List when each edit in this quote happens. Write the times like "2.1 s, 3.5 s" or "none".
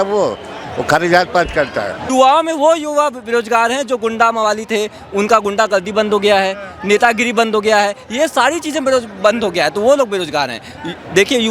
2.0 s